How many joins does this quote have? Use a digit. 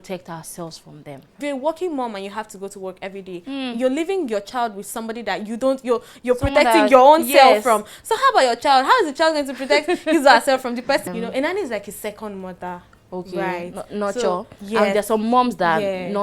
2